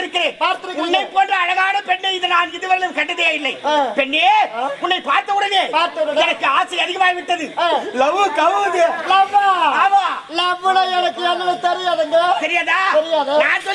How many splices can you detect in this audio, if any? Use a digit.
0